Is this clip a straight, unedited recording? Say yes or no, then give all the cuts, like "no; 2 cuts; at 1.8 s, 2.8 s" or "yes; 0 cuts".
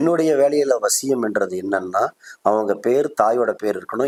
yes; 0 cuts